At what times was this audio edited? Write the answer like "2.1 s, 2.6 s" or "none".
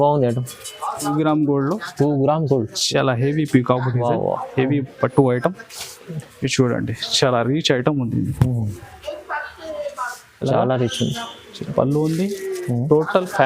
1.1 s